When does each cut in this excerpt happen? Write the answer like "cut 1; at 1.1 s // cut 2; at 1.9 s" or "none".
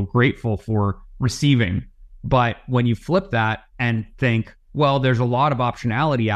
cut 1; at 4.1 s